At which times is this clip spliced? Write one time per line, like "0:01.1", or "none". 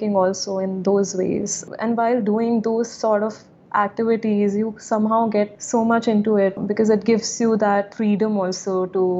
0:01.7
0:05.6
0:06.6